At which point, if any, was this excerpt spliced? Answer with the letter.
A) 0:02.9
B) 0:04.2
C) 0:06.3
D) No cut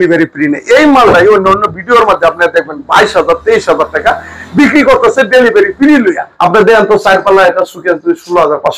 C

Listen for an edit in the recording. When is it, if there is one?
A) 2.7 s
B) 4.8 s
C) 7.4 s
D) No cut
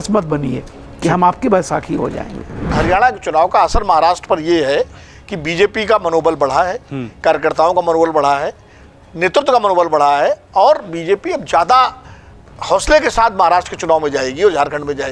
A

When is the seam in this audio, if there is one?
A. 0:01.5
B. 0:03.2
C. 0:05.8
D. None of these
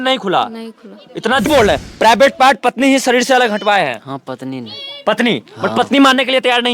A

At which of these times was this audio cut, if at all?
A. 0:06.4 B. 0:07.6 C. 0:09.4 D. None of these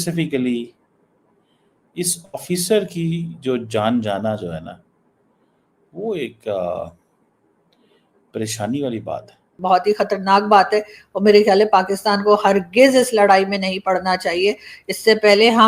C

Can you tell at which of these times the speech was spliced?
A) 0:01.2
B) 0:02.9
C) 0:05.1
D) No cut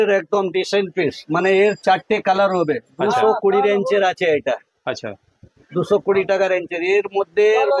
D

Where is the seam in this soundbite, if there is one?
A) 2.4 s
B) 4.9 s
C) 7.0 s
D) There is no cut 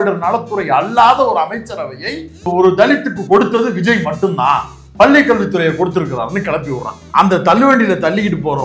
C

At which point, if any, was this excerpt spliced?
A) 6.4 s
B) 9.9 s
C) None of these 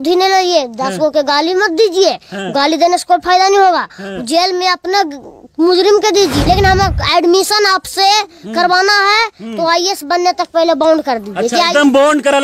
A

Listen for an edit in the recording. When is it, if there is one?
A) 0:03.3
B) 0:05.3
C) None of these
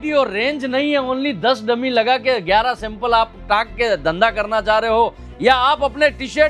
C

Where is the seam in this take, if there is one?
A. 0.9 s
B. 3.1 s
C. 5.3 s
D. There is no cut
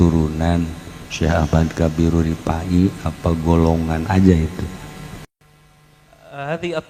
C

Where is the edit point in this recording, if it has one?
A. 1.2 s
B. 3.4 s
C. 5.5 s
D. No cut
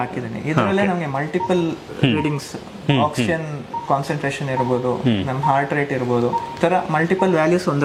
D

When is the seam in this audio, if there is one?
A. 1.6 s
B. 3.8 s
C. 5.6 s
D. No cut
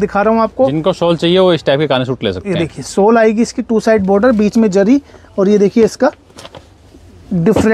D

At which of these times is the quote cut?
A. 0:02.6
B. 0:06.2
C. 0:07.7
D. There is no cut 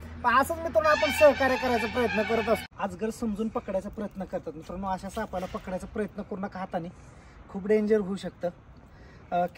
A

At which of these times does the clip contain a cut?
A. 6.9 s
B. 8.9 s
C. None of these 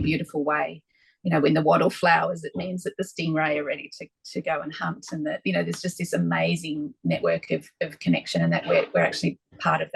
C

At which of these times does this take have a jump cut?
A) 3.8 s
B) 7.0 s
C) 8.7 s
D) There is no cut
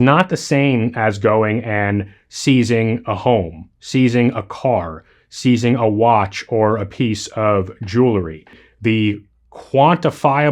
C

